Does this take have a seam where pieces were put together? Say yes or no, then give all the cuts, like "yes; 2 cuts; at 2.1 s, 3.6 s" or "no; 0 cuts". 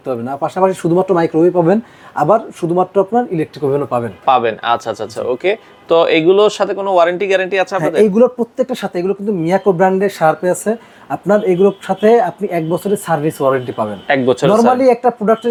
no; 0 cuts